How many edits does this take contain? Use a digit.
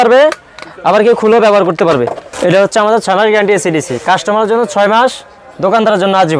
1